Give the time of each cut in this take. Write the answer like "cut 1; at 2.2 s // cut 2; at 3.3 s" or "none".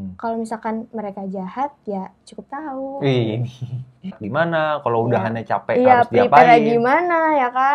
cut 1; at 4.2 s